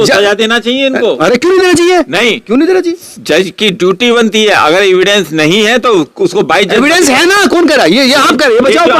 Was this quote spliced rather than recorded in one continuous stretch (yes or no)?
no